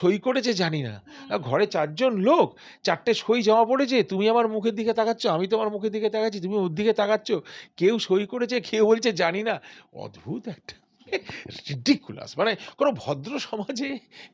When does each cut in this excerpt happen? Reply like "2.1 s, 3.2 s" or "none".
none